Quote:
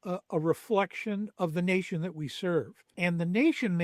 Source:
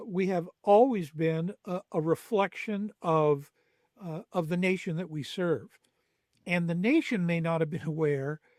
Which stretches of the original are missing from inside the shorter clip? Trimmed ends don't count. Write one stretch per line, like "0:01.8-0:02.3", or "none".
0:02.9-0:04.3
0:05.8-0:06.3